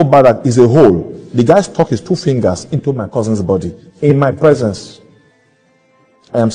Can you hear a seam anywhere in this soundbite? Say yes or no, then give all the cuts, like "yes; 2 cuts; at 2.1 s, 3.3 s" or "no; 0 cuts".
no; 0 cuts